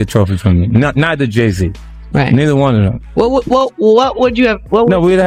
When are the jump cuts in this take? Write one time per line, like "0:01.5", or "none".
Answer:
none